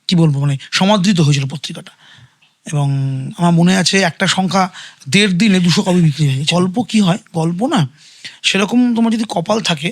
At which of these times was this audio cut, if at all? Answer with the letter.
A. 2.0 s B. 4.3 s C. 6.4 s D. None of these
C